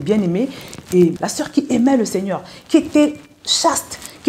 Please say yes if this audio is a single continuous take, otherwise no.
no